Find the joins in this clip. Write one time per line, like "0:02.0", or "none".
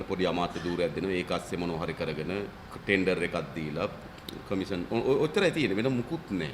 0:02.6